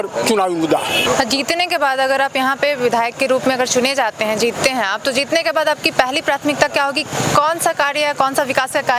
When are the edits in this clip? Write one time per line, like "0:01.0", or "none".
none